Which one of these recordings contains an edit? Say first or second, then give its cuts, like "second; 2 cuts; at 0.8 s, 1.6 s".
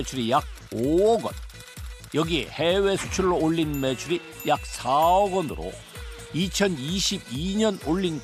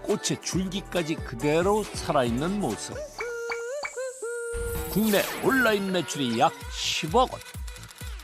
second; 1 cut; at 3.0 s